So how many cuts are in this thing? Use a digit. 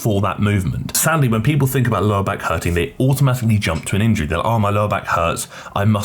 1